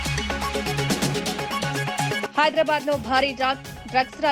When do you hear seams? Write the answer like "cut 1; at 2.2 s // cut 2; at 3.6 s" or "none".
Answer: cut 1; at 2.2 s